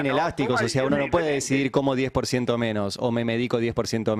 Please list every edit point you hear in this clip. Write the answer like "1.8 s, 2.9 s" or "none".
none